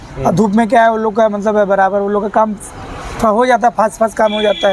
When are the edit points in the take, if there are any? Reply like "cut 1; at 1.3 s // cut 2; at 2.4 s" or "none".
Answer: none